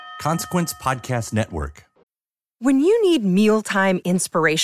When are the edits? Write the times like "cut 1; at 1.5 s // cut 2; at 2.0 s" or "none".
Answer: cut 1; at 1.8 s